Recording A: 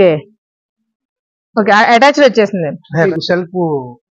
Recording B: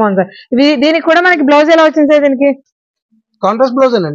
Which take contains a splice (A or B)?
A